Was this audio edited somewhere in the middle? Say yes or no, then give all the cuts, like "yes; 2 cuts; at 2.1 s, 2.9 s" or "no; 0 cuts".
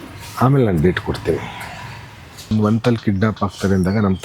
yes; 1 cut; at 2.5 s